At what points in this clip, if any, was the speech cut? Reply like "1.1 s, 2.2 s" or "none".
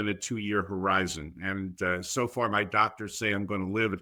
none